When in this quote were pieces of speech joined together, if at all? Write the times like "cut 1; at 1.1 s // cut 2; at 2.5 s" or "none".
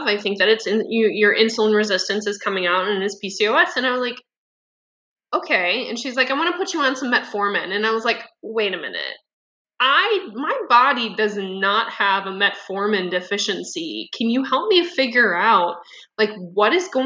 none